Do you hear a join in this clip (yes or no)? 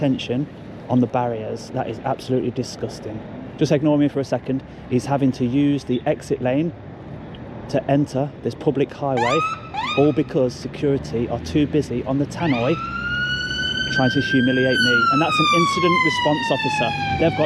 no